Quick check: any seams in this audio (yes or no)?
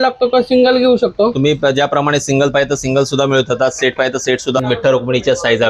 yes